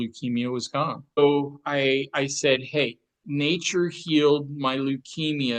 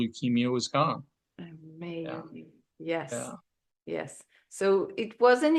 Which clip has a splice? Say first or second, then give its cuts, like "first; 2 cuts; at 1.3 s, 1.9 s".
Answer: first; 2 cuts; at 1.2 s, 3.2 s